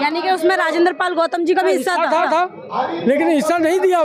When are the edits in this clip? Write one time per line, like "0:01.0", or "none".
none